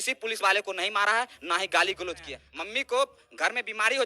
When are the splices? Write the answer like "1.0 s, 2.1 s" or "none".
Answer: 2.4 s